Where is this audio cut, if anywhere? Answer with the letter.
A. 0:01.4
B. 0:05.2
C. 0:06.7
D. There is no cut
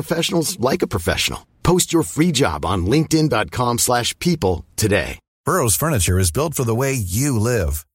B